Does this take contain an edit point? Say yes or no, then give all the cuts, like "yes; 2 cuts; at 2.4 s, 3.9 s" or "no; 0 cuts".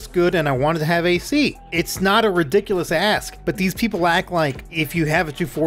yes; 3 cuts; at 1.6 s, 3.3 s, 4.7 s